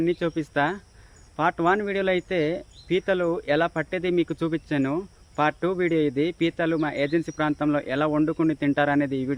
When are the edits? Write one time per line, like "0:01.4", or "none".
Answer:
none